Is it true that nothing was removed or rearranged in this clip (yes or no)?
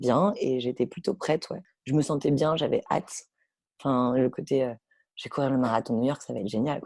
yes